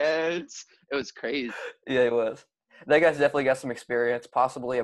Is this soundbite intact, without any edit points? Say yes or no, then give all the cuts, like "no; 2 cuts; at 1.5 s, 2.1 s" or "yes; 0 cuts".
yes; 0 cuts